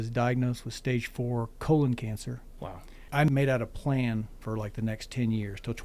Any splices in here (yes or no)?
yes